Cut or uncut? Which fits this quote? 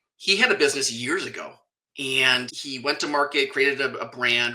cut